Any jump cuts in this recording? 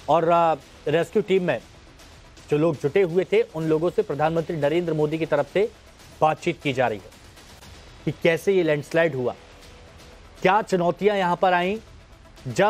yes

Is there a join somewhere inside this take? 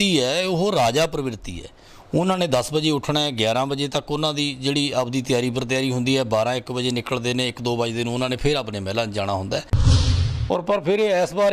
yes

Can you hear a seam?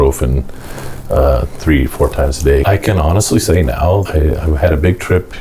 yes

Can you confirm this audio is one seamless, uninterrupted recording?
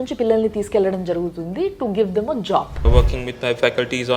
no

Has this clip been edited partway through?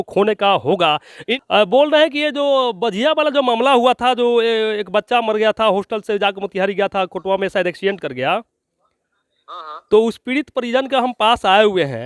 yes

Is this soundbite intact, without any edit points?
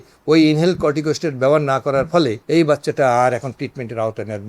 no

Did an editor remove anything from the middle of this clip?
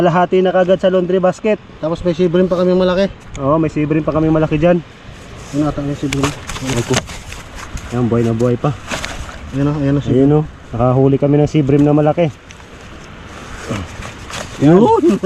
no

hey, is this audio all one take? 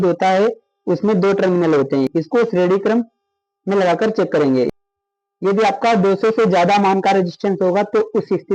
no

